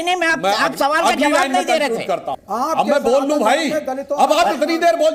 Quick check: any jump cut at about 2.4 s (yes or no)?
yes